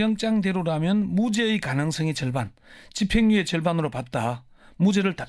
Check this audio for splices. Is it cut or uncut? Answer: cut